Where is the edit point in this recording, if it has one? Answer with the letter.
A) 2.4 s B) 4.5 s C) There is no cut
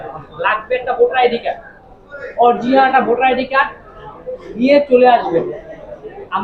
C